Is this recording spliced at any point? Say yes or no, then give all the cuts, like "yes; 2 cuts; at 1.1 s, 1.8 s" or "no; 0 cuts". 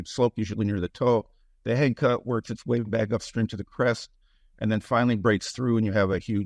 no; 0 cuts